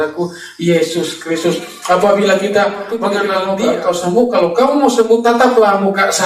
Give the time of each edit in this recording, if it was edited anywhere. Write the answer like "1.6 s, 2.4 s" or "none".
3.3 s